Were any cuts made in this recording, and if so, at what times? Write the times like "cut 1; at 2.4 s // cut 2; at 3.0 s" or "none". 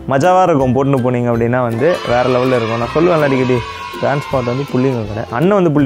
none

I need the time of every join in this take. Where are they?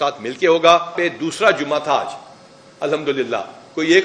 cut 1; at 1.0 s

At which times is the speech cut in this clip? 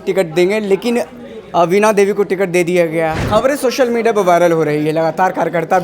cut 1; at 3.2 s

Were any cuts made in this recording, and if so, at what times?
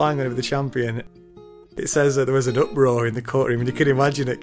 cut 1; at 1.4 s

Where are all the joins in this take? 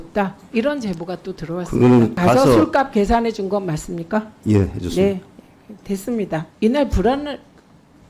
cut 1; at 2.2 s // cut 2; at 6.5 s

